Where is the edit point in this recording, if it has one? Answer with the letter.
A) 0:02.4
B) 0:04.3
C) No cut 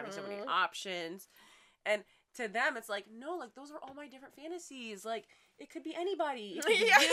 C